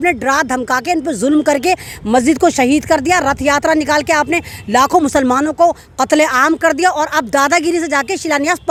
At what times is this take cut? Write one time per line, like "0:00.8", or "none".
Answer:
none